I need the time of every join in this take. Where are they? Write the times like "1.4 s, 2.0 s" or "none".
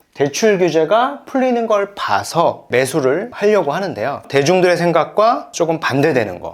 4.2 s